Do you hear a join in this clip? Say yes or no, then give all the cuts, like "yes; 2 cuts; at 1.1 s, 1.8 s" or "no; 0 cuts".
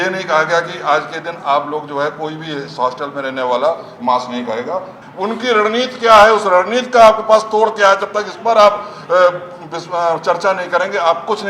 yes; 1 cut; at 5.0 s